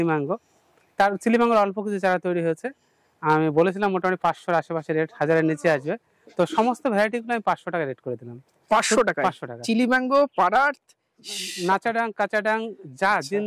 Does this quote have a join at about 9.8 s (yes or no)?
no